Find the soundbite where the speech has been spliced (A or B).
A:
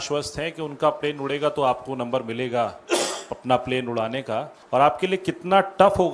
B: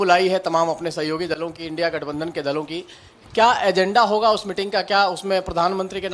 A